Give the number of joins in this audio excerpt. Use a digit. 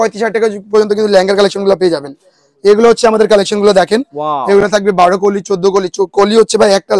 0